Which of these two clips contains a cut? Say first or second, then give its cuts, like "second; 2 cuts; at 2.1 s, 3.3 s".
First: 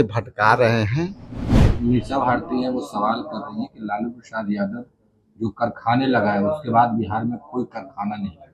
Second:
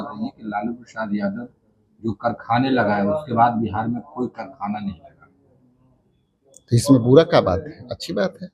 first; 1 cut; at 1.6 s